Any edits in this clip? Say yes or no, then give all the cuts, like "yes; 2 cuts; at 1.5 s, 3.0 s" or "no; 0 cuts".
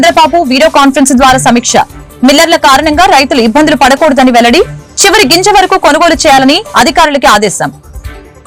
no; 0 cuts